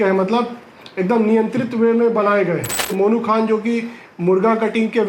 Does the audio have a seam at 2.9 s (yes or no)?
yes